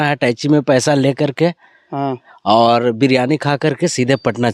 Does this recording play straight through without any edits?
yes; 0 cuts

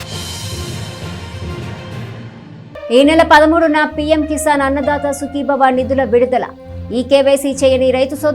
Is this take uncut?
no; 1 cut; at 2.1 s

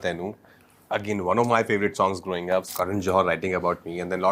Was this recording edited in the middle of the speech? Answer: yes; 1 cut; at 2.7 s

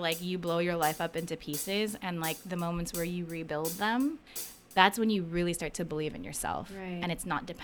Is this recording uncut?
yes; 0 cuts

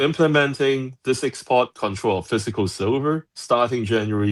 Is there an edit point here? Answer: no; 0 cuts

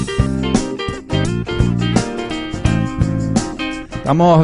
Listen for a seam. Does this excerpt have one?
no; 0 cuts

